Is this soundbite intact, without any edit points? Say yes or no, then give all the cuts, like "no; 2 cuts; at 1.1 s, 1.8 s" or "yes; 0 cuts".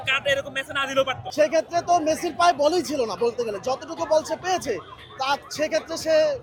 no; 1 cut; at 1.2 s